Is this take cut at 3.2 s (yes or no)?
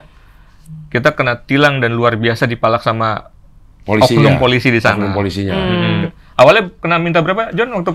no